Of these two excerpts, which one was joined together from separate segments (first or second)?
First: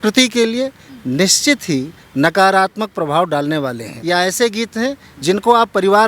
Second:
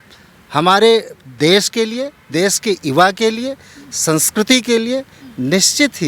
first